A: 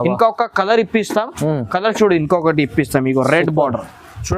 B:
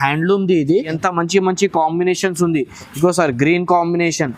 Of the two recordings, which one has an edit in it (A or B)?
B